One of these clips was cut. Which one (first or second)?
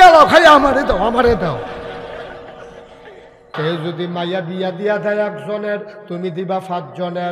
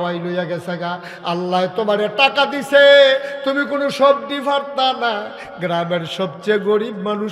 first